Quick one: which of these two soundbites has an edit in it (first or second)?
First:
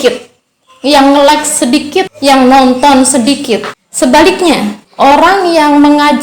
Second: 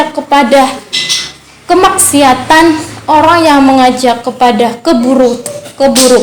first